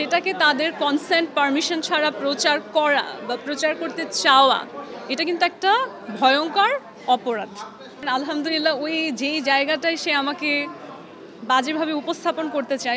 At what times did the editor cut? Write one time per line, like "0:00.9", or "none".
0:08.0